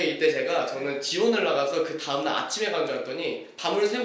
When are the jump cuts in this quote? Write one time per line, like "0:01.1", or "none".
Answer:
none